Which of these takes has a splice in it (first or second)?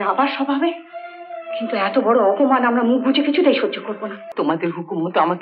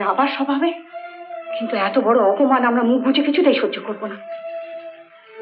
first